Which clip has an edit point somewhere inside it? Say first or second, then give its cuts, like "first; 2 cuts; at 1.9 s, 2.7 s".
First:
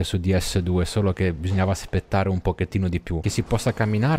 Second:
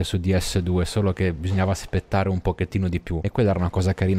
first; 1 cut; at 3.3 s